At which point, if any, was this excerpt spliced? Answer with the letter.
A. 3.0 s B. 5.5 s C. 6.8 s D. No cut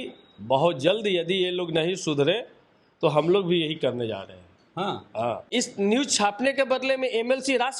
B